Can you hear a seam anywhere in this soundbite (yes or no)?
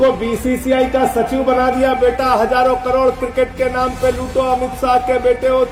no